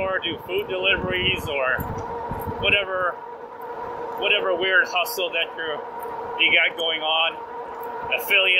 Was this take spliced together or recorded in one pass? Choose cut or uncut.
uncut